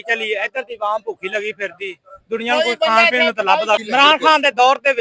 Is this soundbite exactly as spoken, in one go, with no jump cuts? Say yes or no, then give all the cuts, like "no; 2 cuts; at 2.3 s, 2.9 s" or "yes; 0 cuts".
no; 1 cut; at 3.8 s